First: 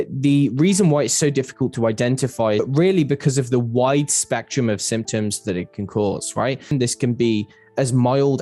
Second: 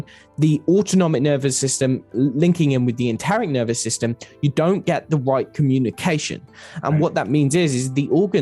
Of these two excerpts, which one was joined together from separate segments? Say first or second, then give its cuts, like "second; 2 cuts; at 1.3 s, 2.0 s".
first; 1 cut; at 6.7 s